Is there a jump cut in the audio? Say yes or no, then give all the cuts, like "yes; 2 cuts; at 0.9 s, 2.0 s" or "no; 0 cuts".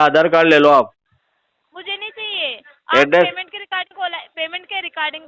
no; 0 cuts